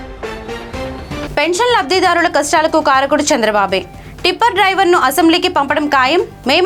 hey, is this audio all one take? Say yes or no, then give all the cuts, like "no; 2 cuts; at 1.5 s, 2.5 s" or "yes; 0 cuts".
yes; 0 cuts